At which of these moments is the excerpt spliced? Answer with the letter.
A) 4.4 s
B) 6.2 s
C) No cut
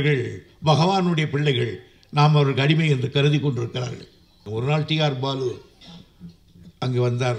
A